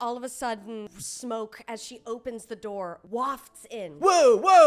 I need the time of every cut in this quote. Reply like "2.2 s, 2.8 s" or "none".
0.9 s, 3.0 s